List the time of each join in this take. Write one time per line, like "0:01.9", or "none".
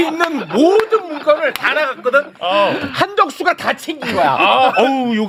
none